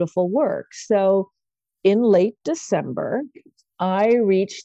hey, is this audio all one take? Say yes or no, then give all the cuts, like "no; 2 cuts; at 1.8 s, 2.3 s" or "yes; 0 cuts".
yes; 0 cuts